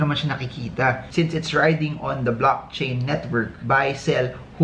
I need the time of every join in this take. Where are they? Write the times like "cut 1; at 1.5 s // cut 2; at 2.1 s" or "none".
cut 1; at 1.1 s // cut 2; at 3.5 s